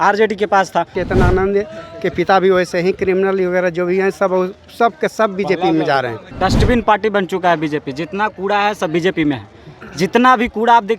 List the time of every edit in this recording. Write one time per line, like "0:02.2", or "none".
0:01.0
0:06.2